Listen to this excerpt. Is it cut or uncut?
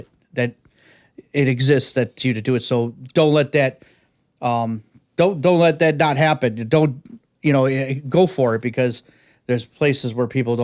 uncut